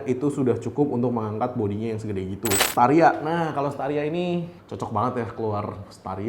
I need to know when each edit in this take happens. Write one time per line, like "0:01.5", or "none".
0:02.7
0:04.6